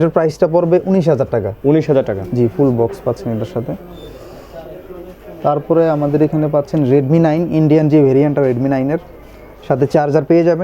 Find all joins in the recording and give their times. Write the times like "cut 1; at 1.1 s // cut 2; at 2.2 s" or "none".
none